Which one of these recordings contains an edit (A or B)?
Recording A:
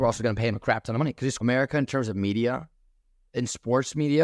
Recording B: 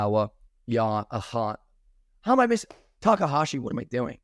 A